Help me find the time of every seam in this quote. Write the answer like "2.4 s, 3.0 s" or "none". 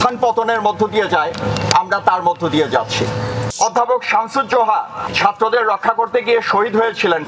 3.5 s, 5.0 s